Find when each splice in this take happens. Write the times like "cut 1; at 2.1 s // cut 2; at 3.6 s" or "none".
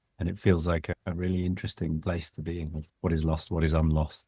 cut 1; at 0.9 s // cut 2; at 2.8 s